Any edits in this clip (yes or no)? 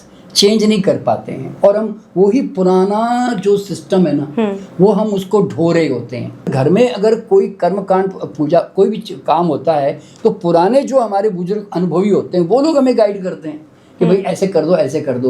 yes